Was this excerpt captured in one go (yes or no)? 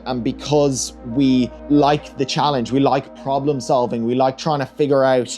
no